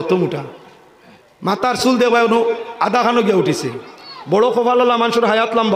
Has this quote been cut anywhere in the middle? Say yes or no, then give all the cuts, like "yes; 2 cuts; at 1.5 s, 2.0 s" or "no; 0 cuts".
yes; 1 cut; at 4.1 s